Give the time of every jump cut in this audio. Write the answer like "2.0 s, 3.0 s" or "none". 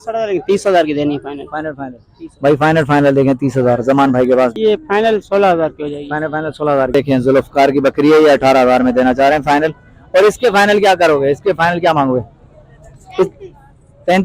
4.5 s, 6.9 s